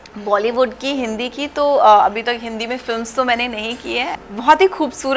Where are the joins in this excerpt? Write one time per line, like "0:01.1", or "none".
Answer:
0:04.2